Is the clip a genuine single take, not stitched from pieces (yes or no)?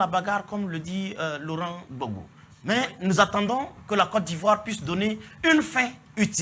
no